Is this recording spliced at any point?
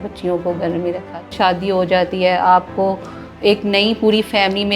yes; 1 cut; at 1.3 s

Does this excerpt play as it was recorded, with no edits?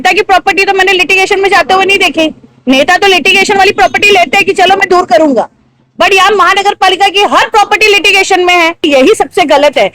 no; 1 cut; at 8.8 s

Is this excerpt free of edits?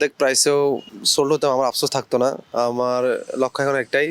no; 1 cut; at 1.0 s

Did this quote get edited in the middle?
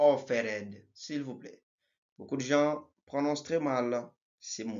no; 0 cuts

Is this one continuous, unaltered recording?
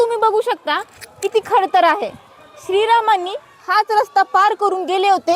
yes; 0 cuts

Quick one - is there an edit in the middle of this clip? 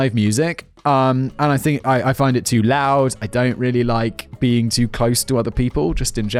no; 0 cuts

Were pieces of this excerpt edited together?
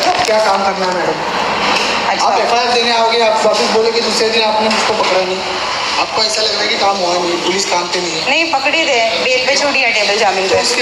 no; 0 cuts

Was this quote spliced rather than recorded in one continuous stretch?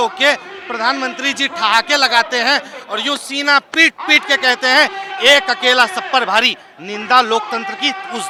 no; 0 cuts

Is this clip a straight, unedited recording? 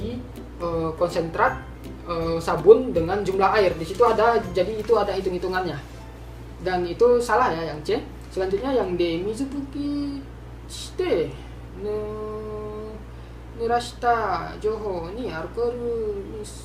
yes; 0 cuts

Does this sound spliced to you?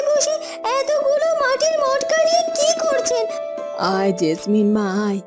no; 0 cuts

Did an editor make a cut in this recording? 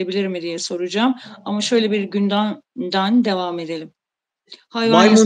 no; 0 cuts

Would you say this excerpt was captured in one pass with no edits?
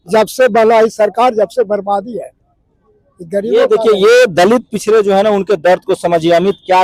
yes; 0 cuts

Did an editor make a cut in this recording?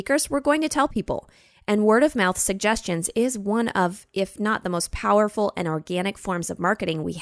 no; 0 cuts

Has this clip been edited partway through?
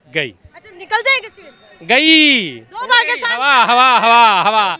no; 0 cuts

